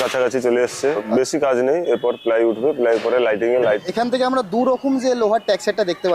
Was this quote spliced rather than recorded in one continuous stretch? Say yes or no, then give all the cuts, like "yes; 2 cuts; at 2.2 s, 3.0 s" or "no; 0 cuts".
yes; 2 cuts; at 1.0 s, 3.8 s